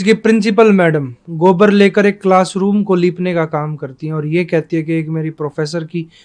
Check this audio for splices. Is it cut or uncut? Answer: uncut